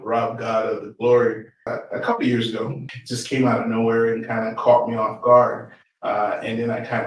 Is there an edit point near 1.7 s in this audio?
yes; 2 cuts; at 1.7 s, 2.9 s

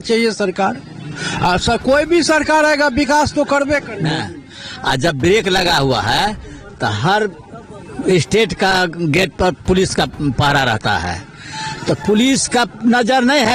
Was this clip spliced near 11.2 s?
no; 1 cut; at 4.1 s

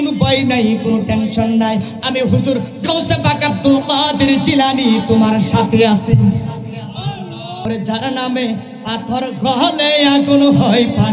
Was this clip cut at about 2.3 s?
no; 1 cut; at 7.6 s

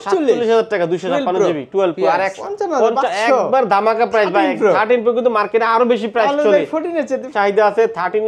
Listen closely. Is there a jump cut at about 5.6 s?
no; 2 cuts; at 2.4 s, 7.3 s

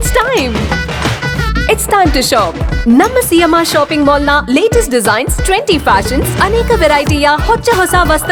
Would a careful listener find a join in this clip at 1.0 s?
no; 0 cuts

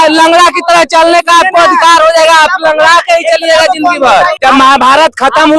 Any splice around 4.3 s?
yes; 1 cut; at 4.3 s

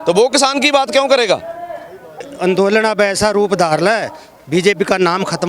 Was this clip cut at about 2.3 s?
yes; 1 cut; at 2.3 s

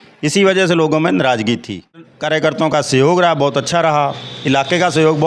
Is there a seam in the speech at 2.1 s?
yes; 1 cut; at 2.1 s

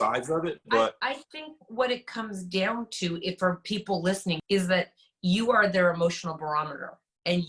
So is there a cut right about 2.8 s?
no; 1 cut; at 4.4 s

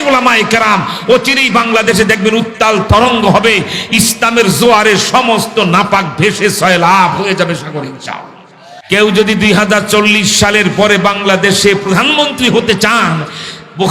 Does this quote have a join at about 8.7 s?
yes; 1 cut; at 8.7 s

